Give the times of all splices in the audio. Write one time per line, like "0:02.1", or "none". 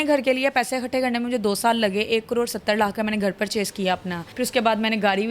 0:04.2

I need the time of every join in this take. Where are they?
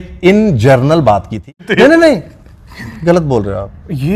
0:01.7

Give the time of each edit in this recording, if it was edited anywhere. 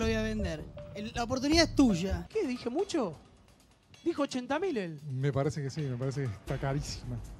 0:02.2

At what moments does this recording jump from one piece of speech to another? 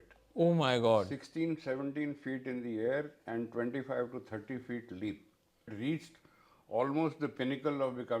0:05.7

